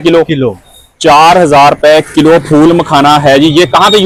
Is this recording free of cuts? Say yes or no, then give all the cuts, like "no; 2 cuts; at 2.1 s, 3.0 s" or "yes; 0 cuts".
yes; 0 cuts